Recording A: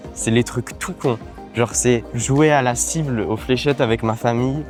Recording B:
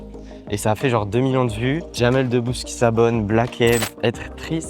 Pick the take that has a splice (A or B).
B